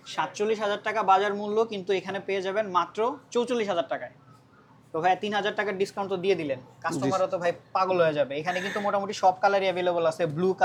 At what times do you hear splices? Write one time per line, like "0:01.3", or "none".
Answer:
none